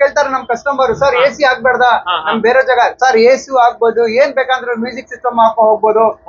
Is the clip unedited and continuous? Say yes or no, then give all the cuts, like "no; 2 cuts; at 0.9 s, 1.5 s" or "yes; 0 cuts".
yes; 0 cuts